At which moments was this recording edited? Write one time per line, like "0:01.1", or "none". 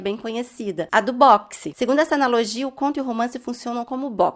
0:01.7

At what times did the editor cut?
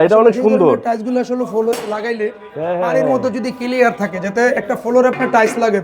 none

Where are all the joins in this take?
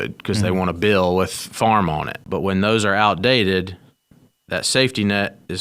0:02.2

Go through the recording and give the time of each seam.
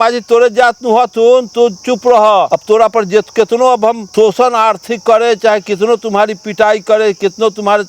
0:02.5
0:04.0

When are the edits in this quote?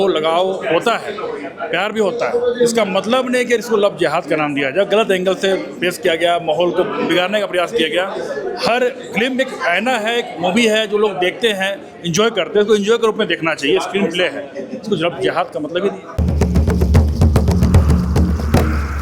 none

